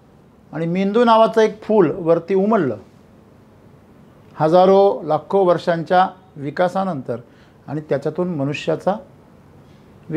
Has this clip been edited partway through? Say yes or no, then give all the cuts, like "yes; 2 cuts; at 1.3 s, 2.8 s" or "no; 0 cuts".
no; 0 cuts